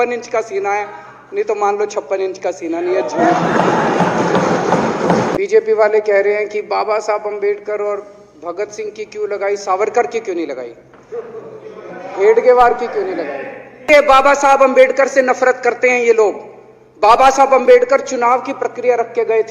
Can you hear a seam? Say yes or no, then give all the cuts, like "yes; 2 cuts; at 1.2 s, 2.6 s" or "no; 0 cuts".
yes; 2 cuts; at 5.3 s, 13.9 s